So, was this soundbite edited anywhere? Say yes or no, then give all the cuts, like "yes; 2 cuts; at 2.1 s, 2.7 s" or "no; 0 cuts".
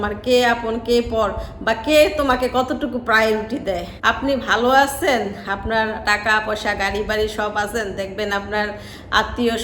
yes; 1 cut; at 3.9 s